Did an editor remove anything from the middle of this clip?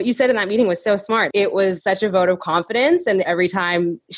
yes; 2 cuts; at 1.6 s, 3.3 s

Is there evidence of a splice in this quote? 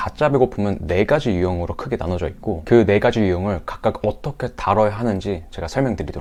no; 0 cuts

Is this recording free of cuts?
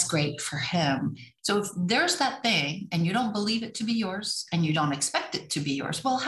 no; 1 cut; at 1.3 s

